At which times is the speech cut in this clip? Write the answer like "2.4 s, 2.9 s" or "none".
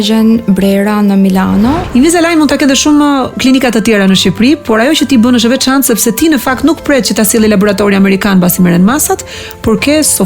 1.8 s